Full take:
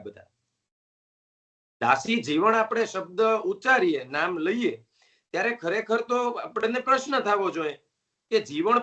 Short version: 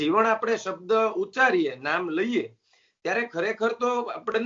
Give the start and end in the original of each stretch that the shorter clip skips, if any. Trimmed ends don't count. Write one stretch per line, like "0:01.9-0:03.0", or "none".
none

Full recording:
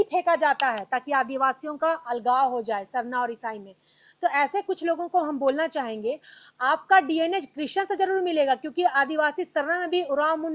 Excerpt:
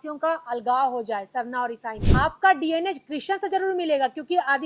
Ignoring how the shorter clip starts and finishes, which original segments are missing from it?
0:03.5-0:06.4

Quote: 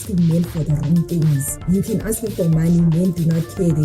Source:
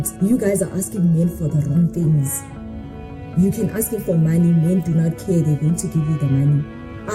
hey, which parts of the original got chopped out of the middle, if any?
0:02.4-0:03.2

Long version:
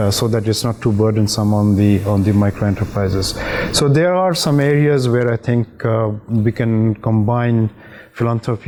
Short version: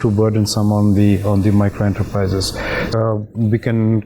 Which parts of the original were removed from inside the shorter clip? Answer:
0:03.7-0:05.8

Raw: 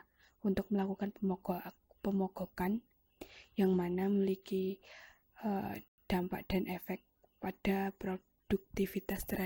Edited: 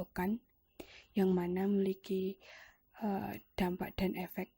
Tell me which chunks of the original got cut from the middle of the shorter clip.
0:05.9-0:06.0

